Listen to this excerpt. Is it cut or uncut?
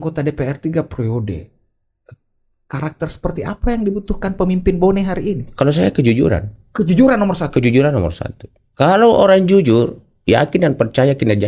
uncut